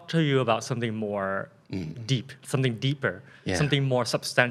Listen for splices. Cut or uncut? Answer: uncut